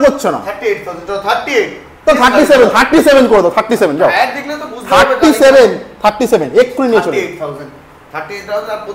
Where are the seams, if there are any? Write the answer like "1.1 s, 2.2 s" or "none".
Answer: none